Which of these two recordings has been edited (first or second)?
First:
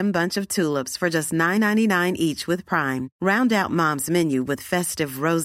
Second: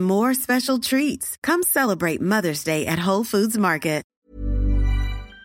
second